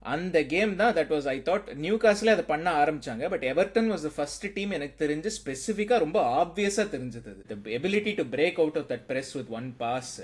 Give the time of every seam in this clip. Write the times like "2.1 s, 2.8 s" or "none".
7.5 s